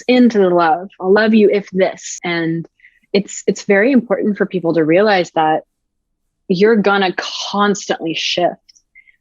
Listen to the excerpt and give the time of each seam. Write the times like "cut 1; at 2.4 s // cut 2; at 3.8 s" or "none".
cut 1; at 2.1 s